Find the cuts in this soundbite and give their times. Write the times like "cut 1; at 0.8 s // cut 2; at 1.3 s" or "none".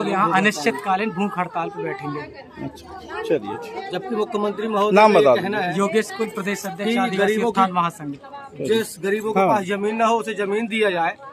none